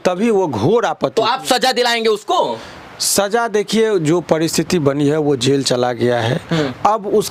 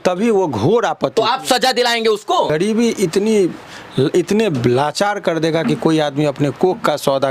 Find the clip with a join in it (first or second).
second